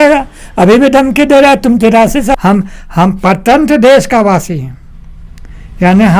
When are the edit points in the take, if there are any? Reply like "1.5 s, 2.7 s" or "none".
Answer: 2.4 s